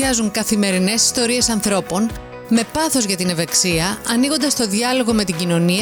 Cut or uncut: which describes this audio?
uncut